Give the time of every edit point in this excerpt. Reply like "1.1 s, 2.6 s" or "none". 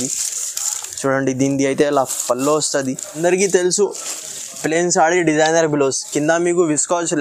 3.2 s